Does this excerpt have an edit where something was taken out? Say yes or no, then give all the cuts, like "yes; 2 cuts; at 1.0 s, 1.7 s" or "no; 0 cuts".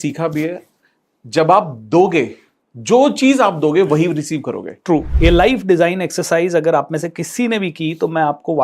yes; 1 cut; at 5.1 s